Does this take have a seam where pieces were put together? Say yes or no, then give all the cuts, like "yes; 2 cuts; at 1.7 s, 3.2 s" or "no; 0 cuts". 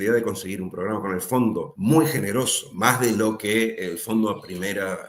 yes; 2 cuts; at 1.7 s, 2.6 s